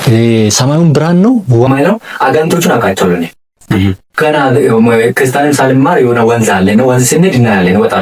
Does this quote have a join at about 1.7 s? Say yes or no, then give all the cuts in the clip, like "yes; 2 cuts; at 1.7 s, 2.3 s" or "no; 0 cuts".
yes; 1 cut; at 1.7 s